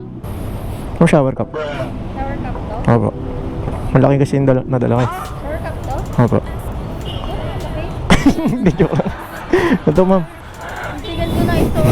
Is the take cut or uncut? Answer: uncut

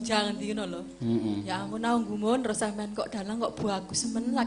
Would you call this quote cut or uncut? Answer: uncut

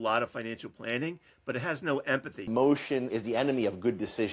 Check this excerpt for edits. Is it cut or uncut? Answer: cut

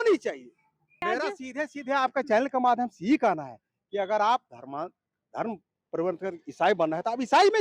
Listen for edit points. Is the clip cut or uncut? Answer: cut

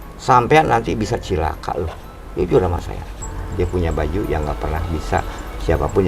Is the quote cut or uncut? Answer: cut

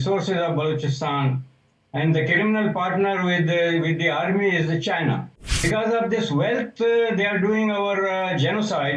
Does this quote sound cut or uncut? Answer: cut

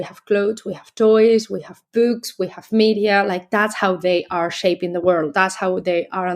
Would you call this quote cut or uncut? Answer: uncut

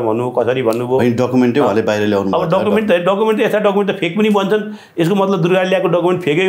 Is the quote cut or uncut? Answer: uncut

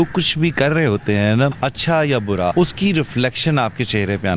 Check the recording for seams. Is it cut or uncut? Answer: cut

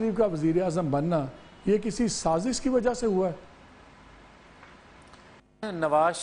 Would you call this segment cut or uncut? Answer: uncut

